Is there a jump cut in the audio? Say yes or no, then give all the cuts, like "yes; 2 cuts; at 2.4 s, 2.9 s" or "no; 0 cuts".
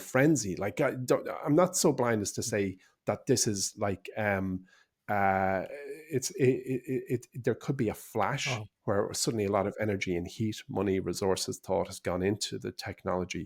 no; 0 cuts